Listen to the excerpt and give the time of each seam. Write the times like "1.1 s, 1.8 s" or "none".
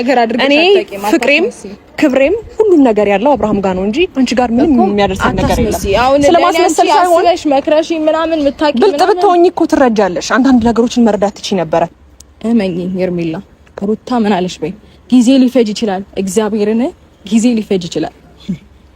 12.0 s